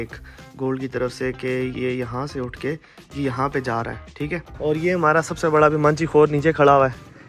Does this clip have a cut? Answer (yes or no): yes